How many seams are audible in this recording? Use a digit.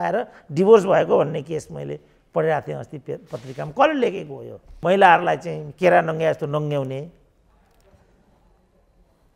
1